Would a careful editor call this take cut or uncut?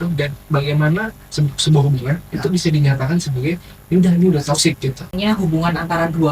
cut